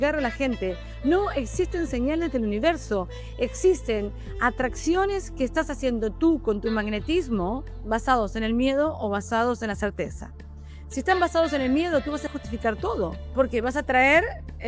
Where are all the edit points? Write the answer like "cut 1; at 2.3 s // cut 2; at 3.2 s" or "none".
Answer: cut 1; at 7.8 s // cut 2; at 12.2 s // cut 3; at 13.2 s

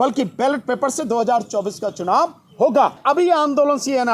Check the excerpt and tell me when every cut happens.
cut 1; at 3.0 s

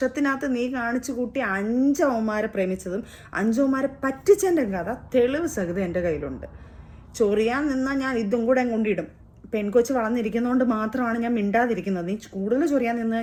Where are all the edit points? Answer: none

